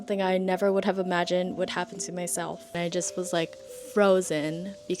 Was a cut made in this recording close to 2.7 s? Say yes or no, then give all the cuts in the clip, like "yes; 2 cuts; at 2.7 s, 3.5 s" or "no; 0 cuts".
yes; 1 cut; at 2.7 s